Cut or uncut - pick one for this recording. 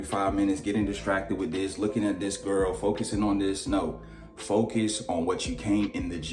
uncut